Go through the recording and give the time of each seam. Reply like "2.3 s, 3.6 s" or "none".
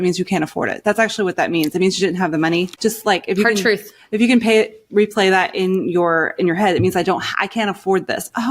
2.7 s